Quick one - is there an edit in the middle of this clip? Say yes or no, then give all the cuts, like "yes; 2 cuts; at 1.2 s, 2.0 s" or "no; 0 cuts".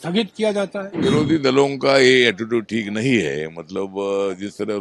yes; 1 cut; at 1.0 s